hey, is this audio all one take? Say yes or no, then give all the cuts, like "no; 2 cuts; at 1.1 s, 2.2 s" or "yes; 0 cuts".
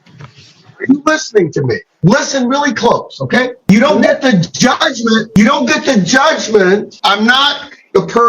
no; 2 cuts; at 3.6 s, 6.9 s